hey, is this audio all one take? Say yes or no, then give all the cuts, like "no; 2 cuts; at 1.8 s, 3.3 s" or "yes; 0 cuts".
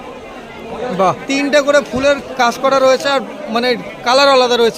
no; 1 cut; at 1.2 s